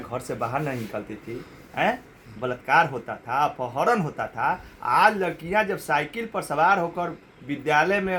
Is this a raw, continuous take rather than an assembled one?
yes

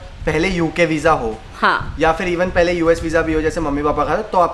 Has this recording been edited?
no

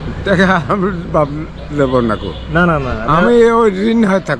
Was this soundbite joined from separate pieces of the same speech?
no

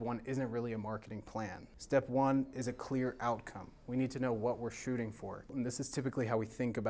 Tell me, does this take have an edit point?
yes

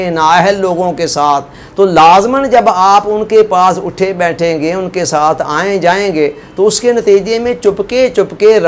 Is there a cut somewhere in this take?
yes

